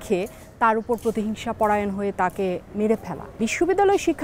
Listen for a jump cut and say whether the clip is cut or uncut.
cut